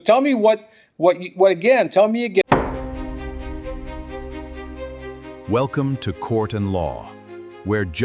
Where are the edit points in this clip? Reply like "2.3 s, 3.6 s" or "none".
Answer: 2.4 s